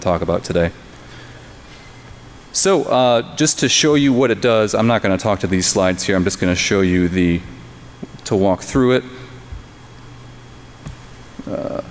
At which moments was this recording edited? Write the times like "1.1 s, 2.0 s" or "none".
3.3 s